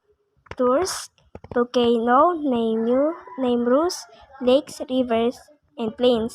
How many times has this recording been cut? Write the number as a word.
one